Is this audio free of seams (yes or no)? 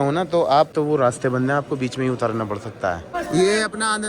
no